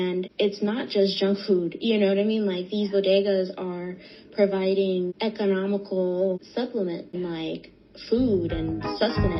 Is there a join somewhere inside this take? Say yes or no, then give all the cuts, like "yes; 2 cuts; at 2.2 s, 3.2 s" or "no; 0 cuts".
no; 0 cuts